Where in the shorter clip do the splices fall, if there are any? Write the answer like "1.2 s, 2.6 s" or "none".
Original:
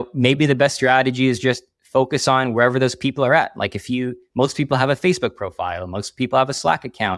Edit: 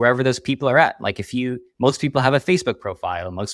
none